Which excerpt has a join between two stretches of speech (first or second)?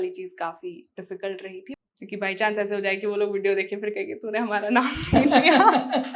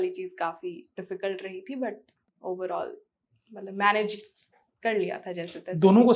first